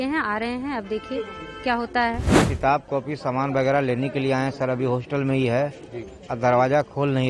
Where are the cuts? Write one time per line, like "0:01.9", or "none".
0:02.3